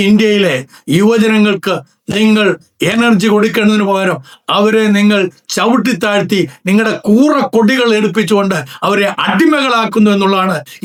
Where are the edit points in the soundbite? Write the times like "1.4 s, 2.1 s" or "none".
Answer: none